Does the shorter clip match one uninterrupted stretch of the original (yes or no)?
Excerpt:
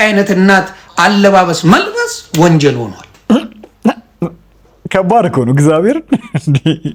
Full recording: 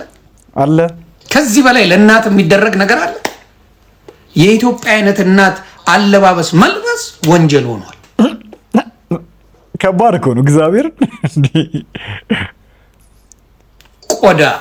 yes